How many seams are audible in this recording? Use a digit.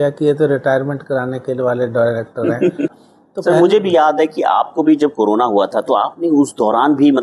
1